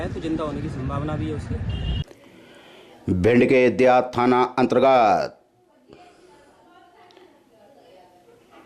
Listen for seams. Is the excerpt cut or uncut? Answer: cut